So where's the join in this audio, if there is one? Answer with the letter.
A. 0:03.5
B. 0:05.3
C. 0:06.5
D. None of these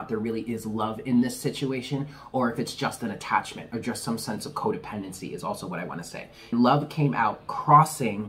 C